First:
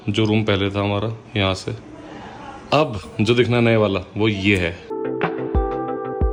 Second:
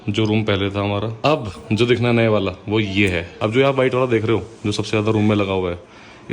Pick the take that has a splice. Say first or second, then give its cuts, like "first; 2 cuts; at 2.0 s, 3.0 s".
second; 2 cuts; at 1.1 s, 3.3 s